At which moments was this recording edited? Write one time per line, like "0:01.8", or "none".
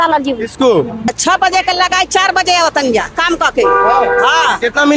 0:01.1